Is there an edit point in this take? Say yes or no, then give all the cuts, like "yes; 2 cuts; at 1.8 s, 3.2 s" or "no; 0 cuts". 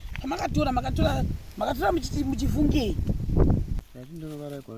yes; 1 cut; at 3.8 s